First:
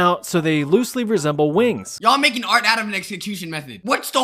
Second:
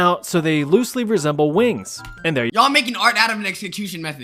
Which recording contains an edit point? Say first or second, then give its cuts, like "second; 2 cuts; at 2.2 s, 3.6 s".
first; 1 cut; at 2.0 s